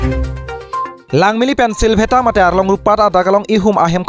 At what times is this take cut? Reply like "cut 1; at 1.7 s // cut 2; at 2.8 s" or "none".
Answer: cut 1; at 1.0 s